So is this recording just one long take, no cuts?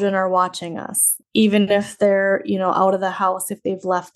yes; 0 cuts

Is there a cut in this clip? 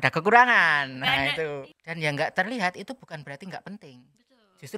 yes; 1 cut; at 1.8 s

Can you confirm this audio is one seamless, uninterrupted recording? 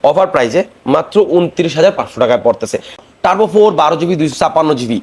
no; 1 cut; at 3.0 s

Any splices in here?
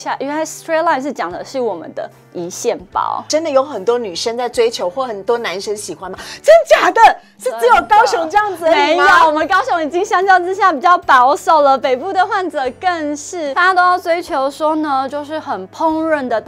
yes; 2 cuts; at 3.3 s, 13.5 s

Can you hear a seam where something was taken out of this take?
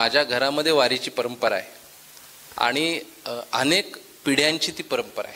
no; 0 cuts

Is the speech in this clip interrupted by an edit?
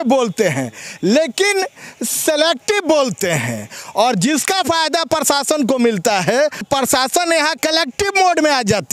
yes; 2 cuts; at 6.6 s, 7.6 s

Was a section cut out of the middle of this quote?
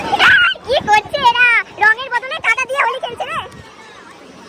no; 0 cuts

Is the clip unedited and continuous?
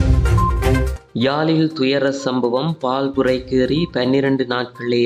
no; 1 cut; at 1.1 s

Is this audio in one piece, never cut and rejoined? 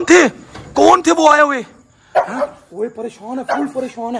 yes; 0 cuts

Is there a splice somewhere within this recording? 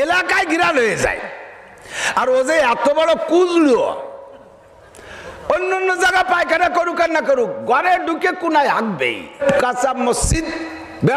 yes; 1 cut; at 9.4 s

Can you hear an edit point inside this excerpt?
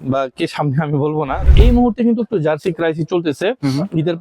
yes; 1 cut; at 1.4 s

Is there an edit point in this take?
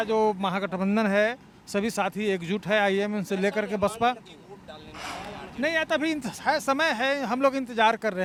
no; 0 cuts

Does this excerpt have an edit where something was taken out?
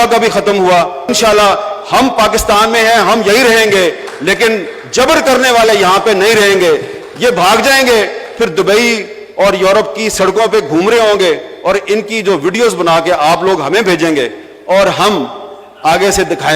yes; 1 cut; at 1.0 s

